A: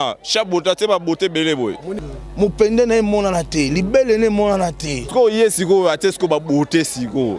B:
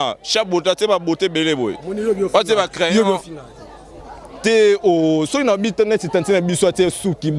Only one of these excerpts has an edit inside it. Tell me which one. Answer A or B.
A